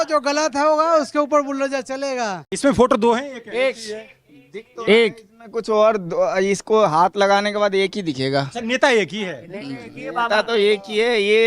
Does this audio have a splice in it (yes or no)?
yes